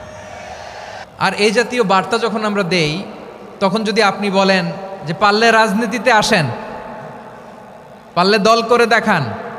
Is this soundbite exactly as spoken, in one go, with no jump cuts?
no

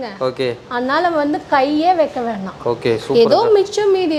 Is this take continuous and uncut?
yes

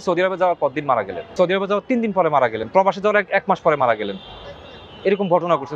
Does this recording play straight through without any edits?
no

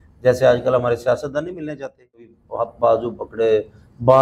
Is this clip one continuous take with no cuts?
no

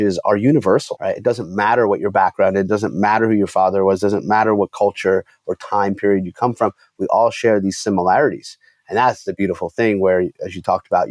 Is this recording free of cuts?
no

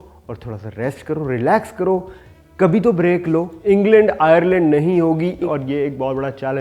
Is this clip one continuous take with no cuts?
no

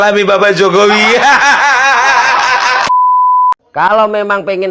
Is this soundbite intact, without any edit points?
no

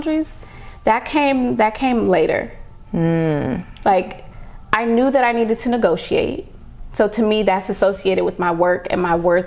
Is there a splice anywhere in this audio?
no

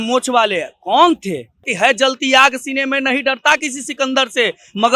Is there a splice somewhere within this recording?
yes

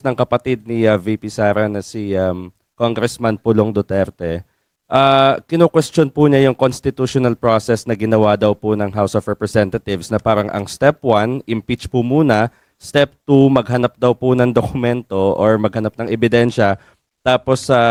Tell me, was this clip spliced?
no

